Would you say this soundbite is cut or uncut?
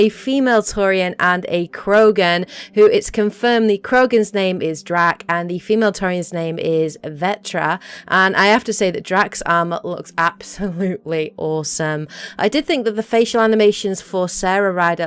uncut